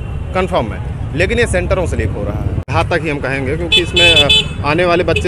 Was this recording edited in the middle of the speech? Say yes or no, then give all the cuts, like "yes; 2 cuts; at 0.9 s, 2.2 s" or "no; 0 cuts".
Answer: yes; 1 cut; at 2.6 s